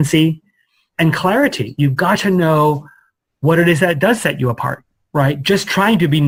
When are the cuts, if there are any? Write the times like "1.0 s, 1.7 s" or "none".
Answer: none